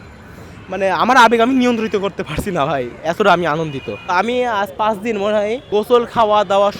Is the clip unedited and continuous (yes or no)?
no